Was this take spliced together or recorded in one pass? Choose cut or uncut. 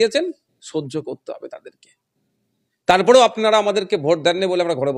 uncut